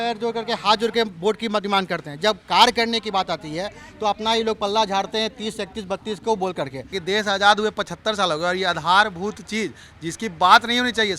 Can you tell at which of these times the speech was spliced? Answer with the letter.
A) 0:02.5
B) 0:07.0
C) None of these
B